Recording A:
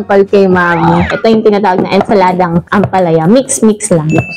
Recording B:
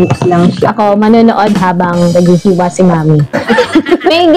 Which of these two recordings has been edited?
A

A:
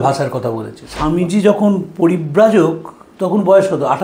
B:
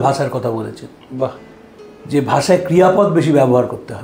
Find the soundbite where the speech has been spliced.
A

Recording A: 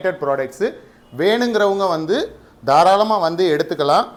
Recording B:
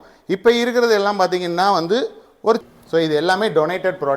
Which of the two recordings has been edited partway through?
B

